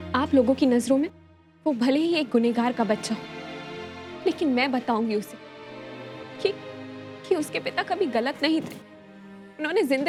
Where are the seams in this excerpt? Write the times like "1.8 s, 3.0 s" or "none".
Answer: none